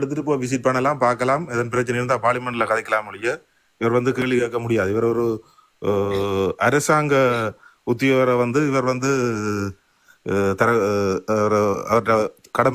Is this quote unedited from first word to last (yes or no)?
yes